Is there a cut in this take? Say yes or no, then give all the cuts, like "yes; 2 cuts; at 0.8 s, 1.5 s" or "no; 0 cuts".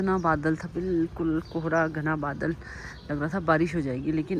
no; 0 cuts